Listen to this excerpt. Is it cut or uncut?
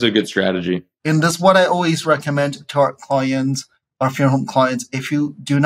cut